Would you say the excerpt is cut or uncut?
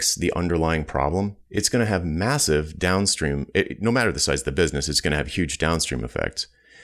cut